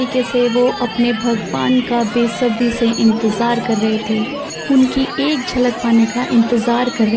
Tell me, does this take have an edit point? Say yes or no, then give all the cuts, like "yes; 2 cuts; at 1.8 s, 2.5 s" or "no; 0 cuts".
no; 0 cuts